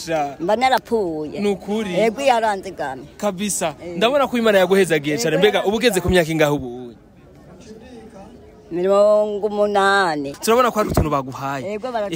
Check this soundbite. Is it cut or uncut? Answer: cut